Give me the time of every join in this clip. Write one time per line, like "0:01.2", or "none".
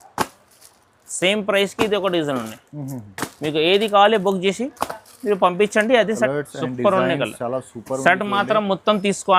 0:06.3